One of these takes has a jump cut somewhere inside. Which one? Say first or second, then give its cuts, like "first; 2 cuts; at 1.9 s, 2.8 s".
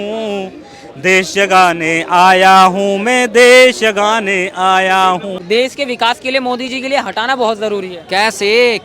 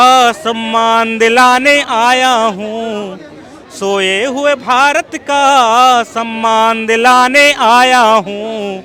first; 1 cut; at 5.3 s